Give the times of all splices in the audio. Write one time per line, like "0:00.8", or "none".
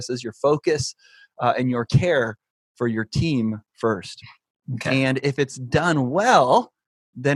none